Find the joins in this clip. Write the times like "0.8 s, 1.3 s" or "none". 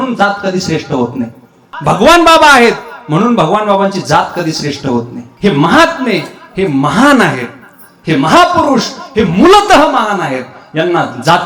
1.7 s, 5.2 s